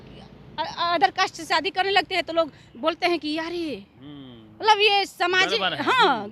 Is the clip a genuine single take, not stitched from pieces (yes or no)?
yes